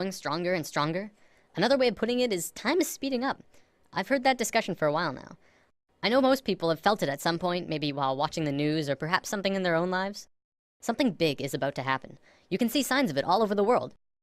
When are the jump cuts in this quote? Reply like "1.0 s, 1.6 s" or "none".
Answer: 11.7 s